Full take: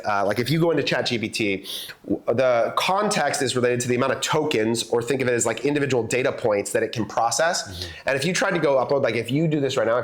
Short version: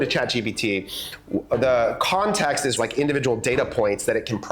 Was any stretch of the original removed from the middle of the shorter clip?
yes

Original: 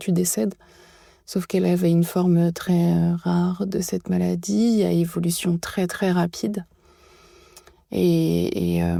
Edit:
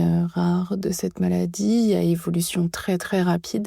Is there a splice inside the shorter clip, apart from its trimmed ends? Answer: no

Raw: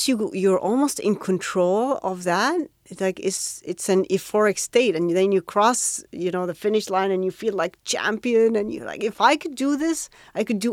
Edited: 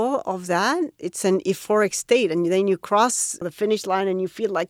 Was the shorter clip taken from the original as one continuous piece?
no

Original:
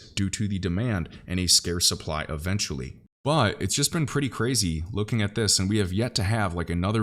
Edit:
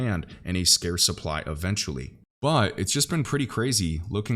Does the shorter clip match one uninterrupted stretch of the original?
yes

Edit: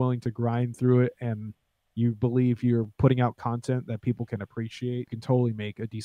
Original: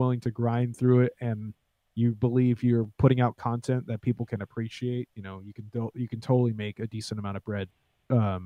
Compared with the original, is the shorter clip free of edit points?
no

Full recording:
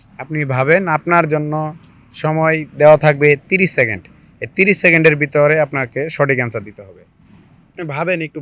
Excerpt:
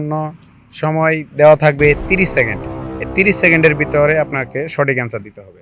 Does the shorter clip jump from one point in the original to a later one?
no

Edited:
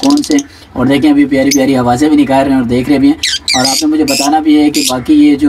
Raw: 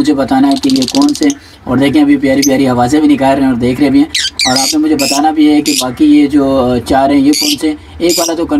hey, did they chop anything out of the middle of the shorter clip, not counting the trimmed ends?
no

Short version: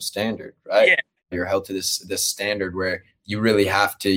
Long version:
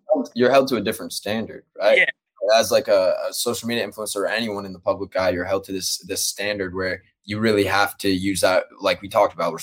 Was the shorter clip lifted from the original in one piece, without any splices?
no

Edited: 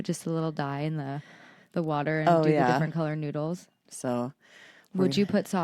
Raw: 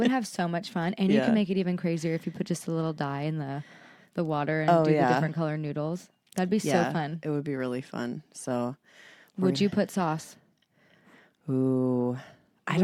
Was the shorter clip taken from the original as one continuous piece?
no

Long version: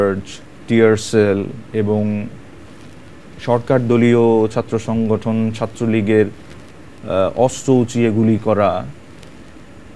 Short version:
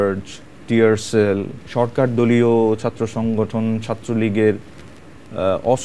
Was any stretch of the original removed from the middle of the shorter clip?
yes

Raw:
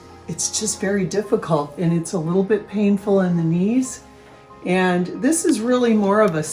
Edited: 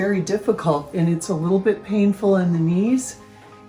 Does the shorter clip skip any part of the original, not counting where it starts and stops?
no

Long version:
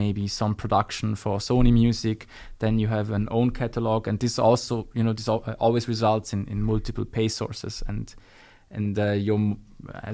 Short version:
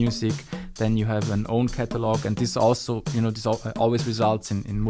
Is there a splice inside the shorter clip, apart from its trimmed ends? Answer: no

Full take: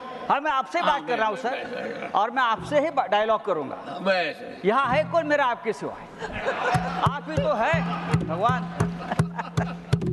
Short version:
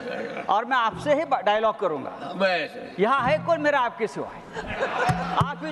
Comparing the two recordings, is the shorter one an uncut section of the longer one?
yes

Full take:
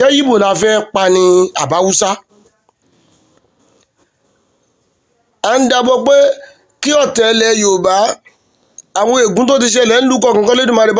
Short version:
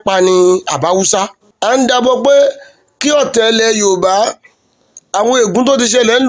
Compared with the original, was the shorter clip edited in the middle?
yes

